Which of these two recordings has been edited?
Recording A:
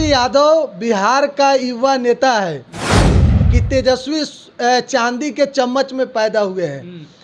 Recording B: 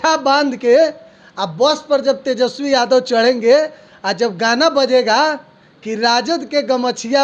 A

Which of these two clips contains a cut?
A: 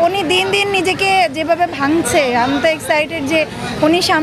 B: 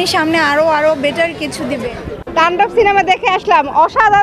B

